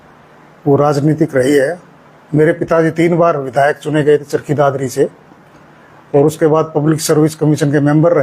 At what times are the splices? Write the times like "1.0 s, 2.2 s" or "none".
none

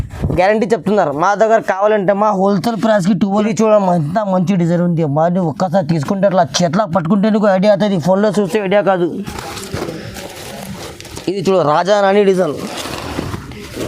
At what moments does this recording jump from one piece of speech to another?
3.4 s

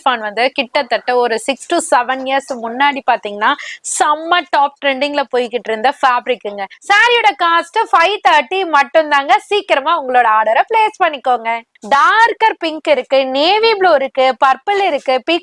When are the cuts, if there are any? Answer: 6.7 s, 11.7 s

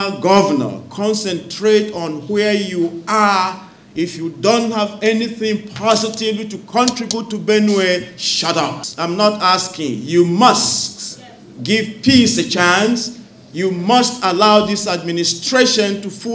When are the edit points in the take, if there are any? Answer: 8.9 s

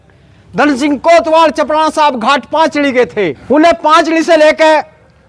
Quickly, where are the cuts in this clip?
3.4 s

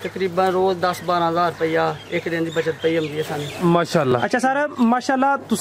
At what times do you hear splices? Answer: none

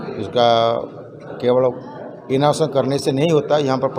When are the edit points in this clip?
none

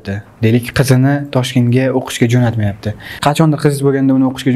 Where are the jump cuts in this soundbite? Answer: 3.1 s

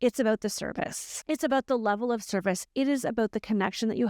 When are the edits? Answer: 1.1 s

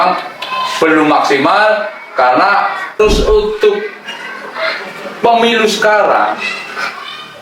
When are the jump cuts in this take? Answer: 3.0 s

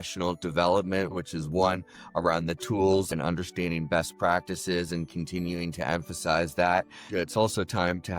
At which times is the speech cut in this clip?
1.1 s, 3.1 s, 7.1 s

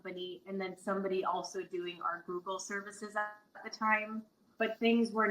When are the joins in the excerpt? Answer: 4.4 s

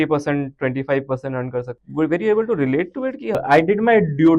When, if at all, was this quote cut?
1.8 s, 3.4 s

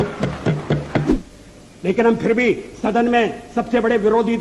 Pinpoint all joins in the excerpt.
1.1 s

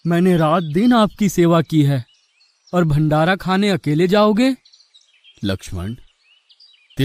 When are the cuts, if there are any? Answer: none

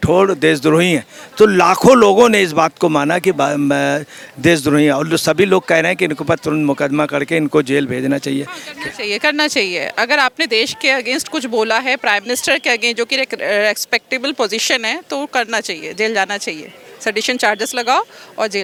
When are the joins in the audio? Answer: none

